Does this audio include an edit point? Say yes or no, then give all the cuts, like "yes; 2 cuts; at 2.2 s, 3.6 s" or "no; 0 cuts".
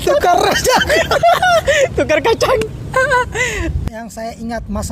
yes; 1 cut; at 3.8 s